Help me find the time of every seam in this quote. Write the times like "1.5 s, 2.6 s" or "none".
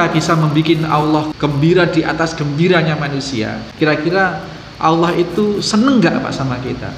1.3 s, 3.6 s